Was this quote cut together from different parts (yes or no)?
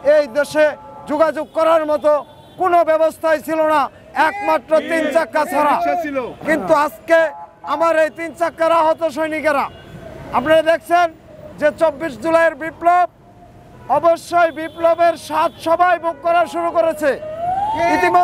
no